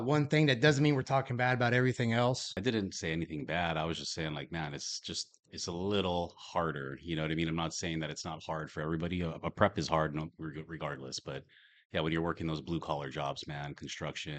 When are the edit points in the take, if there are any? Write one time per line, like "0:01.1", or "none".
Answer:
0:02.5